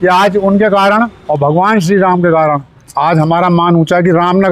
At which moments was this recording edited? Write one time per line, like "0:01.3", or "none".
0:01.2
0:02.8